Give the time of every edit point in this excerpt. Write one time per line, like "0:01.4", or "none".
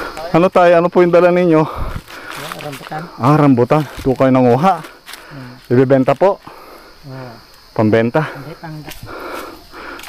0:08.6